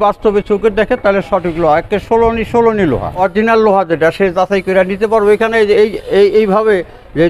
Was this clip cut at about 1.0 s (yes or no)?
no